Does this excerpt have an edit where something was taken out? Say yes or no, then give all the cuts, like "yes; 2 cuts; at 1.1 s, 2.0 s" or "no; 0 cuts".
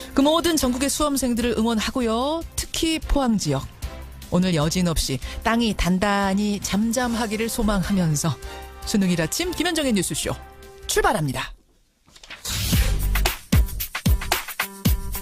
no; 0 cuts